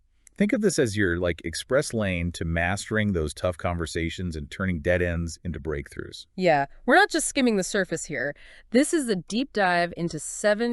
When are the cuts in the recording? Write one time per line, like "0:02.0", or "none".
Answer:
0:04.8